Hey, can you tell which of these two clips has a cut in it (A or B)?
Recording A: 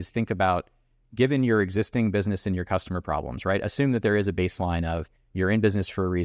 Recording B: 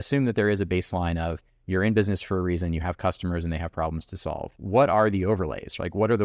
B